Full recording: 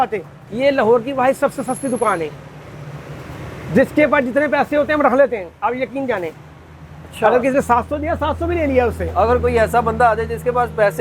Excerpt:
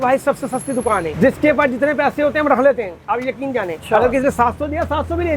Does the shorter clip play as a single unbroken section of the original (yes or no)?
no